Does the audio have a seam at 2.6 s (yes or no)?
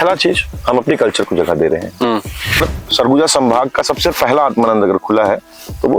yes